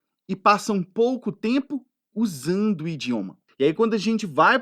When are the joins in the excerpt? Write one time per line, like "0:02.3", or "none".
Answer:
0:03.4